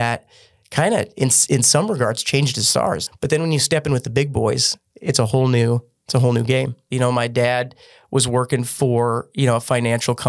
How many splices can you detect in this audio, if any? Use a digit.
2